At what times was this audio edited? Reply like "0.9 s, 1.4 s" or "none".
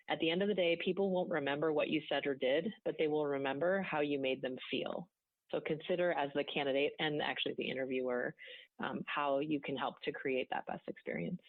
none